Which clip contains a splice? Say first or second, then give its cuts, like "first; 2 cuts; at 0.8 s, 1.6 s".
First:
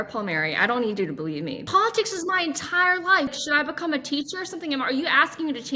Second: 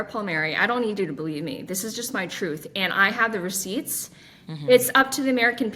first; 2 cuts; at 1.6 s, 3.3 s